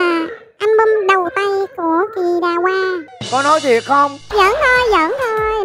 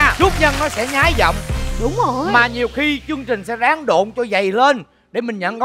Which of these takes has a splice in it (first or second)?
first